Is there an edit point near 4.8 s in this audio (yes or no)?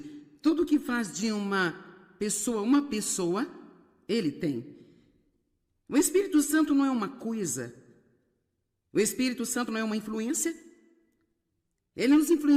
no